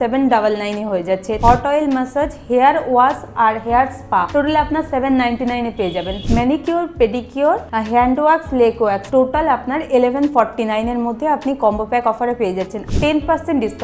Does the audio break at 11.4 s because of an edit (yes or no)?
no